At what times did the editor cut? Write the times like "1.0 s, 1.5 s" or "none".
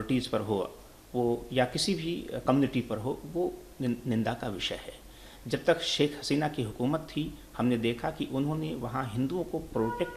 none